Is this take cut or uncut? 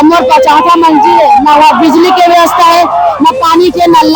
uncut